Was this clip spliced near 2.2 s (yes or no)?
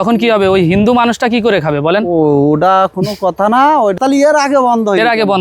no